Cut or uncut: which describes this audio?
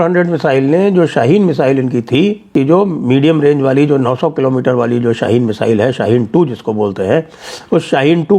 cut